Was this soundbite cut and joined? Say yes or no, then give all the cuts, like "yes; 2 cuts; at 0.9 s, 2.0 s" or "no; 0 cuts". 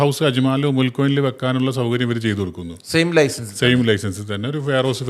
no; 0 cuts